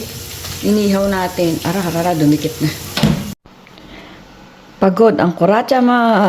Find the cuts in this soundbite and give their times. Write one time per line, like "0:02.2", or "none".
0:03.3